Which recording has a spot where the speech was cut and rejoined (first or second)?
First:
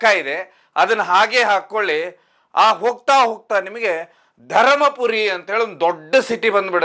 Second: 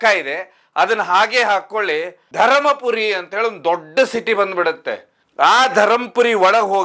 second